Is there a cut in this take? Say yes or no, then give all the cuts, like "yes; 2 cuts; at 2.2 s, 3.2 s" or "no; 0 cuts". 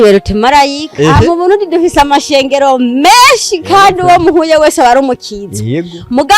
yes; 1 cut; at 1.2 s